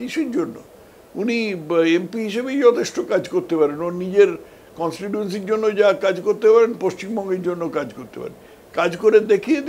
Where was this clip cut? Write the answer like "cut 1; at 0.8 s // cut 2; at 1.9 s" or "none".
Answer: none